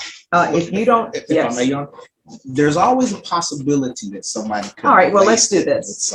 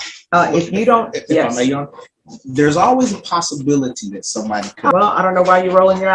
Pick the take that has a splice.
second; 1 cut; at 4.9 s

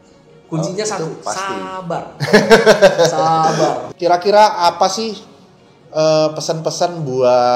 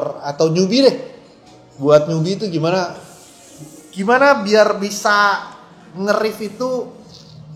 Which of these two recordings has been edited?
first; 1 cut; at 3.9 s

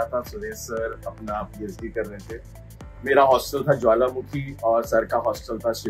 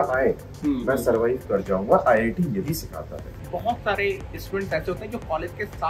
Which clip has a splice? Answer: second; 1 cut; at 3.2 s

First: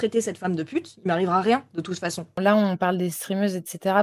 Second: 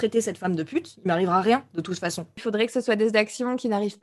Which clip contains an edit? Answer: first; 1 cut; at 2.3 s

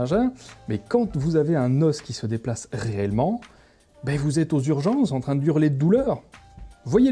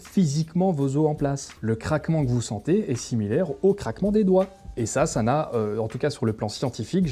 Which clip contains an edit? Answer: second; 1 cut; at 4.5 s

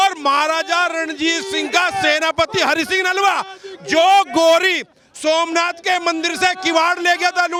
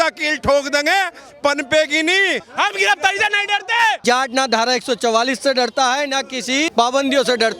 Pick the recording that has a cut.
second; 3 cuts; at 2.4 s, 4.0 s, 6.7 s

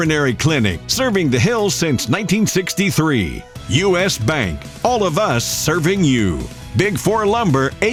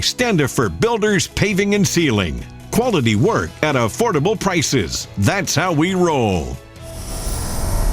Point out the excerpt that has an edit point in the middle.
second; 1 cut; at 6.7 s

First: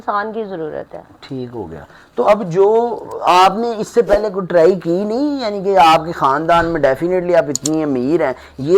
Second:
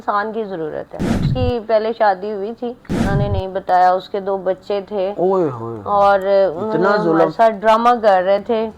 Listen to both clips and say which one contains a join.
second; 2 cuts; at 1.3 s, 3.1 s

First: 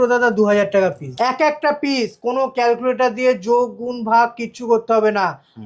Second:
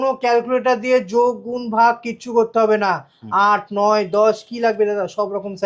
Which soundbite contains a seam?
first; 1 cut; at 1.1 s

